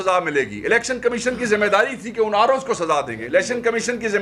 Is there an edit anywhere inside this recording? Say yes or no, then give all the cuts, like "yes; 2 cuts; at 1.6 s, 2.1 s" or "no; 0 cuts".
no; 0 cuts